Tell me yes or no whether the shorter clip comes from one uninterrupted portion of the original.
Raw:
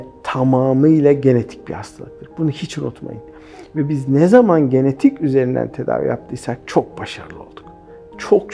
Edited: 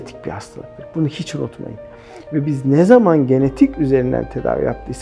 yes